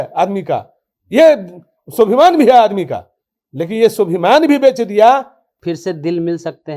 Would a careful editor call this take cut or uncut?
cut